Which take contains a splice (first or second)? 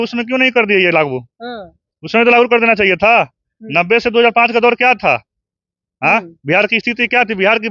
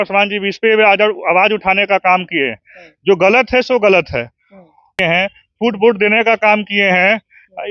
second